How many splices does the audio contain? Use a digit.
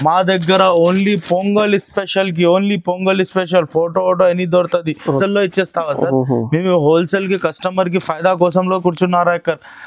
1